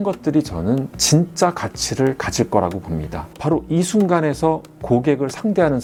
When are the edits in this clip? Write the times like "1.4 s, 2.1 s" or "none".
none